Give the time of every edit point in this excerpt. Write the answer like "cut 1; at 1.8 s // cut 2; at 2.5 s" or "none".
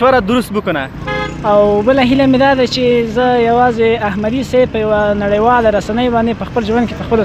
cut 1; at 1.0 s